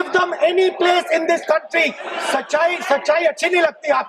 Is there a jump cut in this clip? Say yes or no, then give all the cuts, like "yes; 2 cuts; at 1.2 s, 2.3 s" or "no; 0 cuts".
yes; 1 cut; at 2.1 s